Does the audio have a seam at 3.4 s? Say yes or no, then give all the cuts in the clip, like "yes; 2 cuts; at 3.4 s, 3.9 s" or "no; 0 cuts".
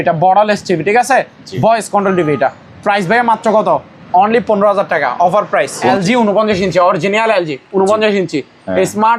no; 1 cut; at 5.9 s